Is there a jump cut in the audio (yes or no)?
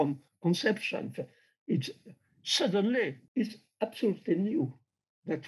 yes